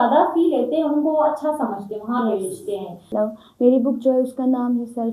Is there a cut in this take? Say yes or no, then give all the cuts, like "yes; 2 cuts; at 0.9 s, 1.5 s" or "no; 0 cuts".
yes; 1 cut; at 3.1 s